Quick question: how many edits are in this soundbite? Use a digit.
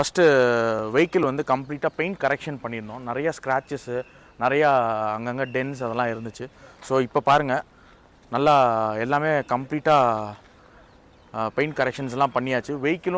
0